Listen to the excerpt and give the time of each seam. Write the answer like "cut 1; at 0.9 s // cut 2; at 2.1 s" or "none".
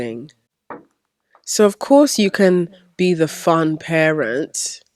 none